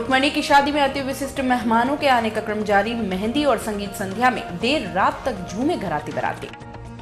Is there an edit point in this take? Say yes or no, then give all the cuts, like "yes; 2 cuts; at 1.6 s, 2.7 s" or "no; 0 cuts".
no; 0 cuts